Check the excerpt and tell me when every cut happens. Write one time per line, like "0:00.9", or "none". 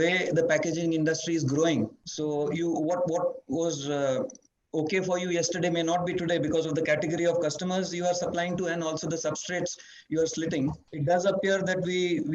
0:02.0
0:10.9